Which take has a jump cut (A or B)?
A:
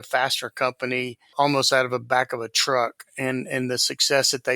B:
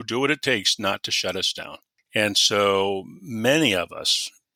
A